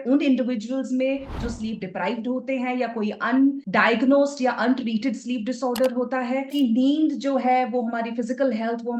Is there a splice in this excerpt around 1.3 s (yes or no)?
no